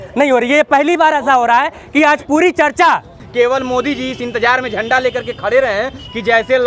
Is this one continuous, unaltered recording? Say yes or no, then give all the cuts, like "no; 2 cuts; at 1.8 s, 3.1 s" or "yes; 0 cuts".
no; 1 cut; at 3.2 s